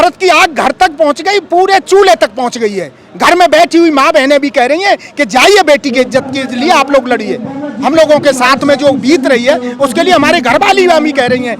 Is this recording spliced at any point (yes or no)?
no